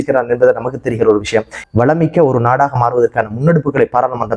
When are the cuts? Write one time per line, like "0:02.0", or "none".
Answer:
0:01.6